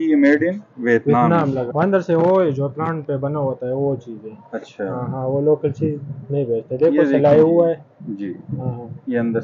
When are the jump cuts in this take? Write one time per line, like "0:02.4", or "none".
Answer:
0:01.7